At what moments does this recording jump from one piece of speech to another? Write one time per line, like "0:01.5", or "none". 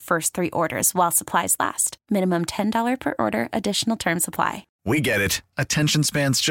0:04.7